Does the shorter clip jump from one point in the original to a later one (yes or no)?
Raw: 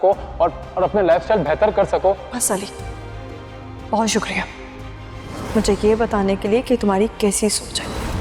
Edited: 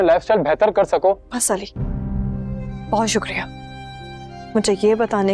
no